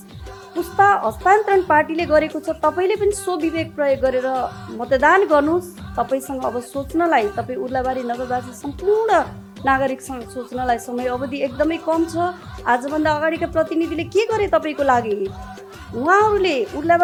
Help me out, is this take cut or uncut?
uncut